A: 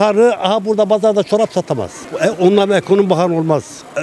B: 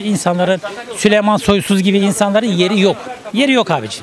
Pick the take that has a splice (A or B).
A